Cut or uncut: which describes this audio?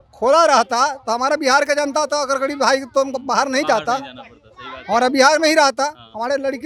uncut